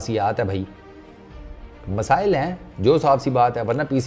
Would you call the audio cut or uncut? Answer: uncut